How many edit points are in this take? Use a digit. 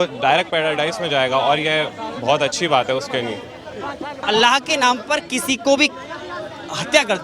1